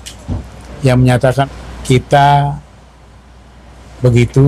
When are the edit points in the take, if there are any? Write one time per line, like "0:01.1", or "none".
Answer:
0:01.4